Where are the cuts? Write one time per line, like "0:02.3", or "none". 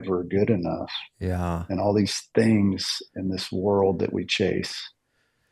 none